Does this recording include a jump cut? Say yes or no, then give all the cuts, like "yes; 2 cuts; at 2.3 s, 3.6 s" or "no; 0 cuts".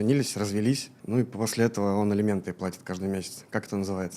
yes; 1 cut; at 0.9 s